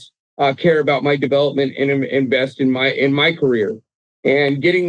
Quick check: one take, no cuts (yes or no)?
yes